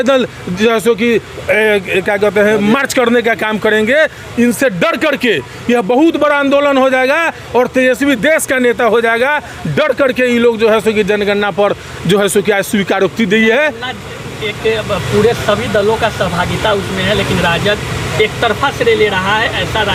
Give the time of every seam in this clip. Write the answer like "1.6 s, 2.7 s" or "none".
none